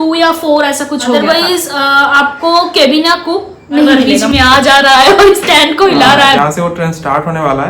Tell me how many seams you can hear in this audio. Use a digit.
3